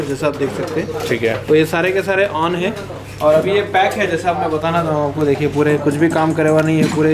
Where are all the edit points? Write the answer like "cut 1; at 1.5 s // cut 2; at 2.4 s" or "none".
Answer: none